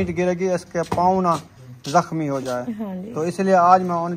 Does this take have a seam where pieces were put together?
no; 0 cuts

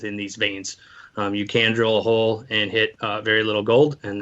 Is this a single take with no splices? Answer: no; 1 cut; at 3.0 s

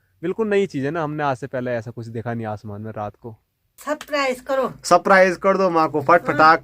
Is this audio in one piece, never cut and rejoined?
no; 1 cut; at 3.7 s

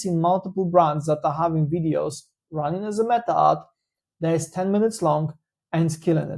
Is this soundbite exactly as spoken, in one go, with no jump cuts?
yes; 0 cuts

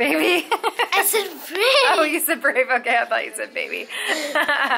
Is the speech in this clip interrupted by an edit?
no; 0 cuts

